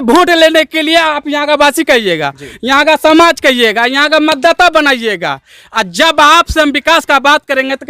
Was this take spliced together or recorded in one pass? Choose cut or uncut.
uncut